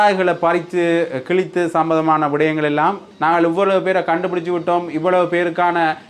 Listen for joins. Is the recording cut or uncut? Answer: cut